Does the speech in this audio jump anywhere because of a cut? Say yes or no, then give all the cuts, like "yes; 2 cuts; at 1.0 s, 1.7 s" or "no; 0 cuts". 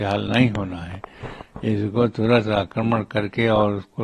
no; 0 cuts